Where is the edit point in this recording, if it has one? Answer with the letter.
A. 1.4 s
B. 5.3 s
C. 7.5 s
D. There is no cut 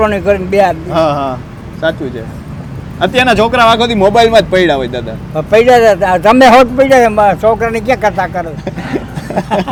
D